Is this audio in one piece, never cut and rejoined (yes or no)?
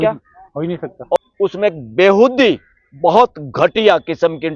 no